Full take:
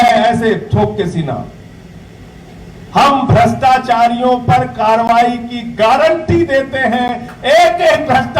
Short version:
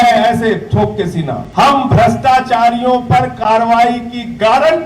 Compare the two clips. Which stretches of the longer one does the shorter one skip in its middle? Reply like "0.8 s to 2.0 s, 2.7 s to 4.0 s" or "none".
1.4 s to 2.8 s